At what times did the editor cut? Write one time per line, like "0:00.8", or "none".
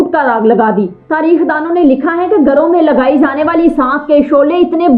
none